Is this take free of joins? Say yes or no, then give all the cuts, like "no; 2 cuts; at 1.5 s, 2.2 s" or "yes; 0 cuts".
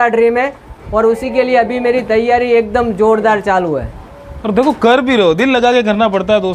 yes; 0 cuts